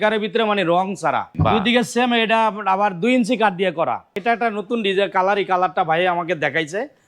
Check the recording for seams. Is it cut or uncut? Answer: cut